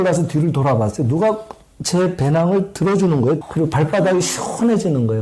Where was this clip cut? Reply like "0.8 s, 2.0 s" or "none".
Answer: 3.5 s